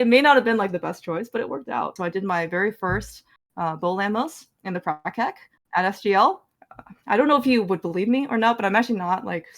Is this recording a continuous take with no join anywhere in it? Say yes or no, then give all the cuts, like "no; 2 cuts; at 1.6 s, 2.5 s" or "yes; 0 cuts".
no; 2 cuts; at 1.9 s, 6.5 s